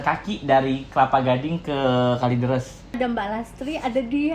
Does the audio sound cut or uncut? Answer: cut